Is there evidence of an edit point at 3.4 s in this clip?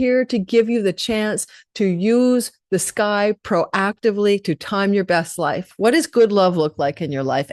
no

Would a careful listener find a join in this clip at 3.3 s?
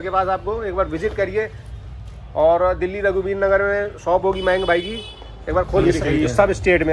no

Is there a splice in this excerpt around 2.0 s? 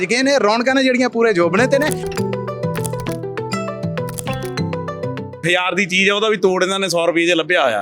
yes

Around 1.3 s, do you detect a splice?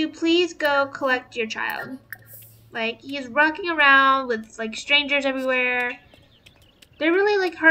no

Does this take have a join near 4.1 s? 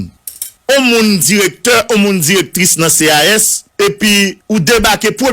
yes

